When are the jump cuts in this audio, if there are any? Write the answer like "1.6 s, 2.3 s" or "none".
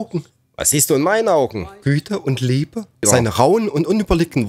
3.0 s